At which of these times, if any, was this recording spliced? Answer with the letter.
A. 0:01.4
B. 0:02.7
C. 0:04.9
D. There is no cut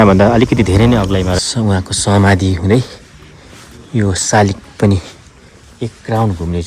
A